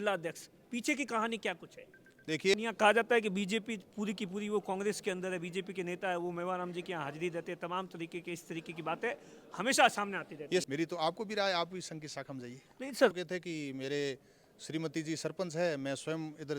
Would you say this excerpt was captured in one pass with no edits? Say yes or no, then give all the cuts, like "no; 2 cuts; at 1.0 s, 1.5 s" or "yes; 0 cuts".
no; 3 cuts; at 2.5 s, 10.7 s, 13.1 s